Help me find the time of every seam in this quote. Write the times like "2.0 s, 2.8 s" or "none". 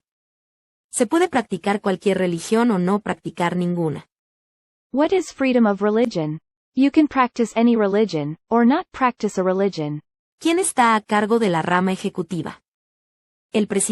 10.2 s

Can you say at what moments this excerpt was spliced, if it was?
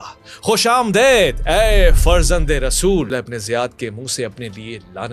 3.1 s

